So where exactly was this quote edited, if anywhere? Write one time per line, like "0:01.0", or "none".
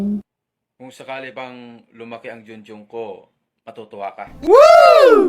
0:04.4